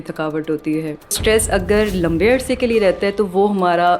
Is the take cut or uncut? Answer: cut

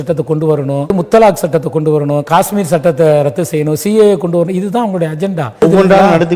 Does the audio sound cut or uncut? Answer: cut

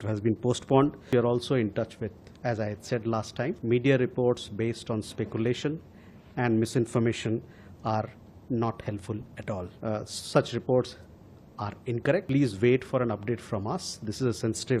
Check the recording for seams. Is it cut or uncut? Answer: cut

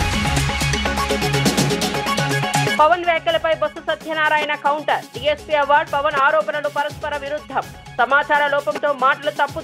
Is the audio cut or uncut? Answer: cut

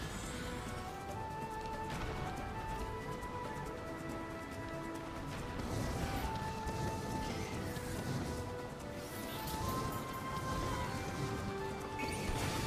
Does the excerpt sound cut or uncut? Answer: uncut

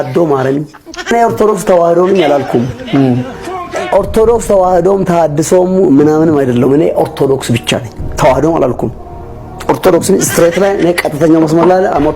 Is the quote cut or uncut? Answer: cut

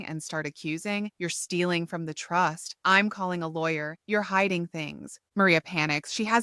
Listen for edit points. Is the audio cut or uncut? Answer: uncut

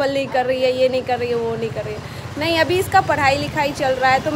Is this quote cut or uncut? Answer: uncut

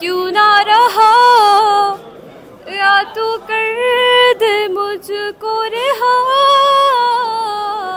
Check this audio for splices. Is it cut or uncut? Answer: uncut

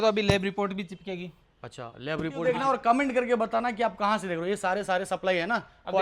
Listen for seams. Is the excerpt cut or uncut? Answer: cut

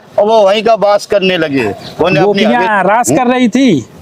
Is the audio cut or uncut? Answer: cut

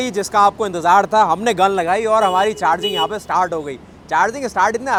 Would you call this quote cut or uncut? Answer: uncut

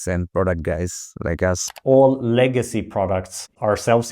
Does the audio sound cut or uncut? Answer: cut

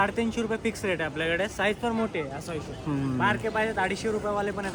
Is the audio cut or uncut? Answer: uncut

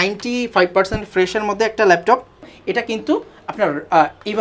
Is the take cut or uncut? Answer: cut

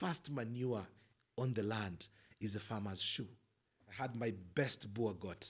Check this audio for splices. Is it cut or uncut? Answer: cut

